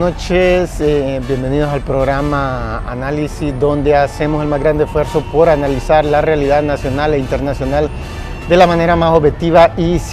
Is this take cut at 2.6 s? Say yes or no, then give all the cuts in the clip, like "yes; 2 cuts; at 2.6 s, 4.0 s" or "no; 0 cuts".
yes; 1 cut; at 2.6 s